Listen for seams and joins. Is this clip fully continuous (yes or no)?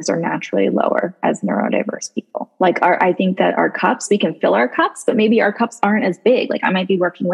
no